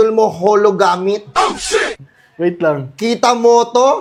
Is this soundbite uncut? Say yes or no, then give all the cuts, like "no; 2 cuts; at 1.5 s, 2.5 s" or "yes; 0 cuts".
yes; 0 cuts